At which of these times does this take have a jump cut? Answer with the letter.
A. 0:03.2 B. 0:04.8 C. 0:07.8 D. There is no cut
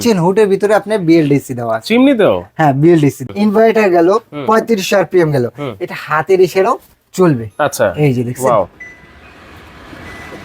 A